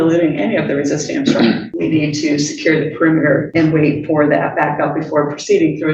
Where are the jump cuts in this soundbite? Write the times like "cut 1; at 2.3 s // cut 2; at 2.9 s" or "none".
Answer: cut 1; at 1.7 s // cut 2; at 3.5 s